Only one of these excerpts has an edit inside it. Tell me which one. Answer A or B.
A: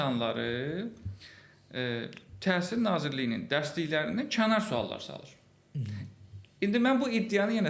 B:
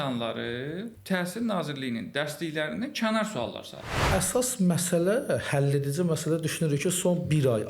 B